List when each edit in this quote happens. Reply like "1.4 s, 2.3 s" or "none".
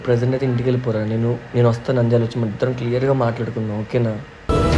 none